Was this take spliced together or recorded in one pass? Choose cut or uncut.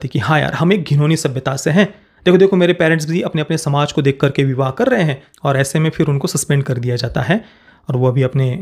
cut